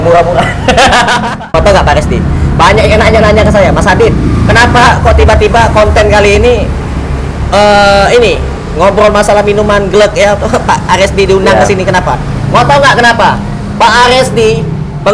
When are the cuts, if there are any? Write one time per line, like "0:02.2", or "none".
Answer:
0:01.3